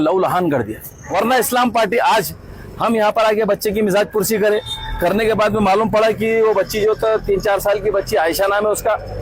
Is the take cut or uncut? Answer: cut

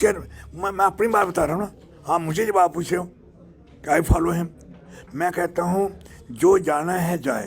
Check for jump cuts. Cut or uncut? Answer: uncut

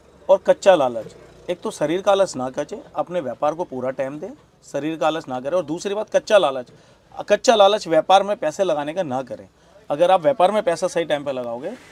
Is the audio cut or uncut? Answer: uncut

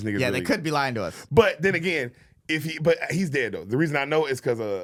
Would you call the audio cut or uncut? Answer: uncut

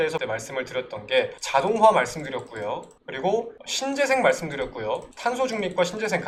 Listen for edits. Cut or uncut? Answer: uncut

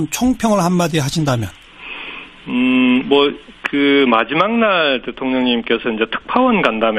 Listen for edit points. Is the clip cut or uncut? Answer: uncut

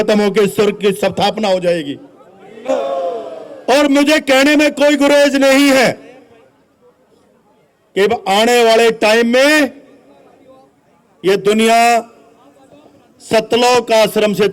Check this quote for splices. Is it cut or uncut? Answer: cut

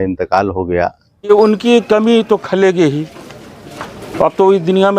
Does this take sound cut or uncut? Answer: cut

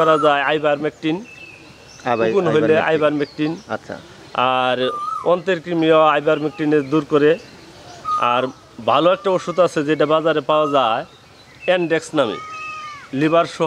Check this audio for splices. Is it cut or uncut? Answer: uncut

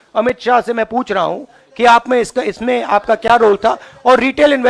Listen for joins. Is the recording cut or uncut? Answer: uncut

